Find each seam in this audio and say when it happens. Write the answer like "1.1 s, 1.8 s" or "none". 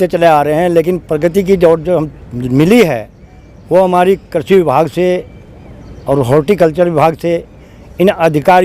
none